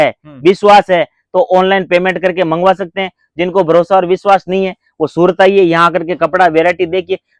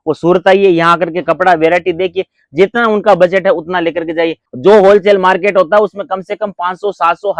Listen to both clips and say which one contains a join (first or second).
second